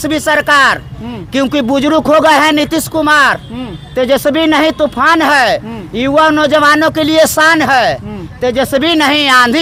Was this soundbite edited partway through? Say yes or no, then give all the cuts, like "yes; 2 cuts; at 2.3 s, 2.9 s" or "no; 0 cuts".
no; 0 cuts